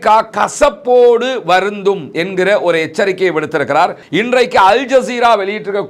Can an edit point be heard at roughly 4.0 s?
yes; 1 cut; at 4.0 s

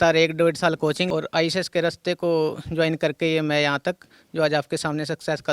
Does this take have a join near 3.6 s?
no; 1 cut; at 1.0 s

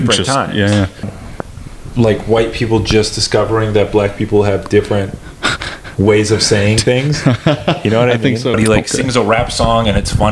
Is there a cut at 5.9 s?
no; 2 cuts; at 1.1 s, 8.6 s

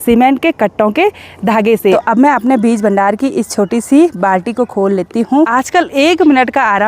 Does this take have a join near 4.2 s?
no; 2 cuts; at 2.0 s, 5.5 s

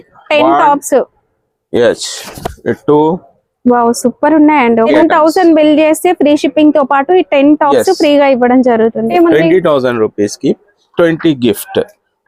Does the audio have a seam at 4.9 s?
yes; 2 cuts; at 4.9 s, 9.1 s

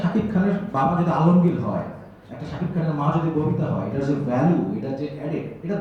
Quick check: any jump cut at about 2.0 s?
no; 0 cuts

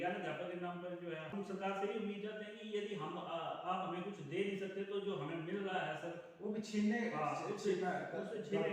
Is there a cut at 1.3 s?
yes; 1 cut; at 1.3 s

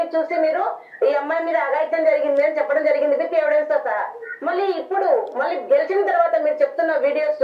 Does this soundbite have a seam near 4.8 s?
yes; 1 cut; at 4.8 s

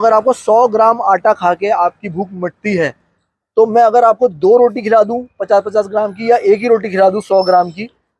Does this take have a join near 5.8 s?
no; 0 cuts

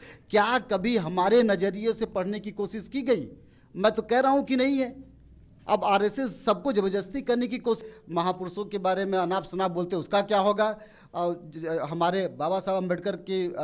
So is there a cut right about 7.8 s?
yes; 1 cut; at 7.8 s

